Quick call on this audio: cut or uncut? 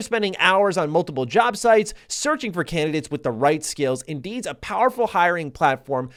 uncut